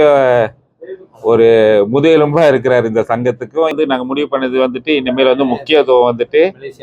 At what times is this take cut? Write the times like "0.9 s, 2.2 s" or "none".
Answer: 3.7 s